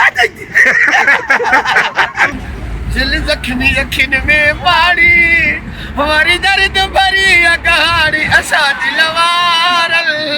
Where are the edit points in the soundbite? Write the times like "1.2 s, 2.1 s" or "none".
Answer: 2.3 s